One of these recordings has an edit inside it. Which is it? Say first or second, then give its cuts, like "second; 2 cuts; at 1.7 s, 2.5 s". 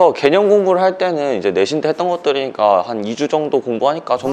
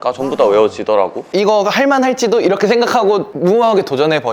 second; 1 cut; at 1.2 s